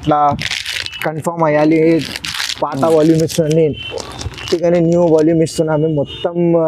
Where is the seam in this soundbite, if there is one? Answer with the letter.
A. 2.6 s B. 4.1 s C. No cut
C